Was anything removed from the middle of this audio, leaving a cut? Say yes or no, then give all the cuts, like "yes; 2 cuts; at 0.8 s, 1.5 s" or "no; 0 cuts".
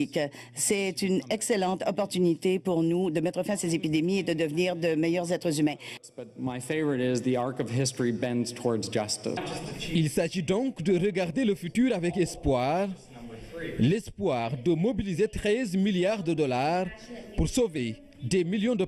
no; 0 cuts